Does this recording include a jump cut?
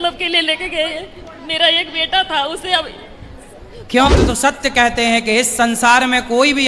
yes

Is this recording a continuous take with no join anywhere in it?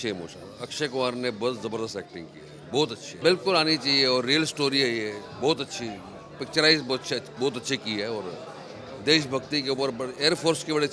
yes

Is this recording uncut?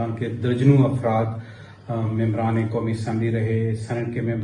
yes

